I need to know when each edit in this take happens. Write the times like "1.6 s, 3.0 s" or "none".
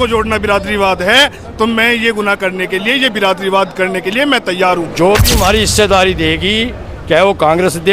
4.9 s